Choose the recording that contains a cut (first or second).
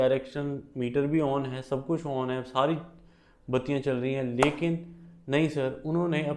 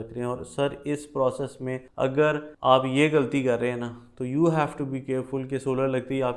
second